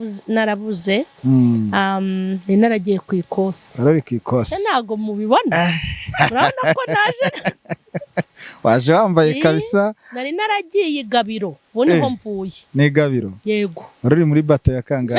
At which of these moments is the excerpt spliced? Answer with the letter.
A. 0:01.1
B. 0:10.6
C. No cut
C